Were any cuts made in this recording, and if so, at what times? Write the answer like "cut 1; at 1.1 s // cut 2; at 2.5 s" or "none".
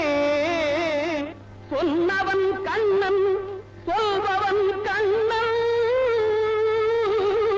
none